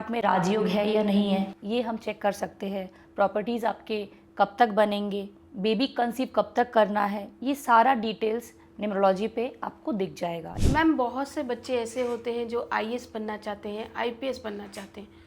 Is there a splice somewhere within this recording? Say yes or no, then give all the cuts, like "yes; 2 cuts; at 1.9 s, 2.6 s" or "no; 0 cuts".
yes; 2 cuts; at 5.4 s, 10.5 s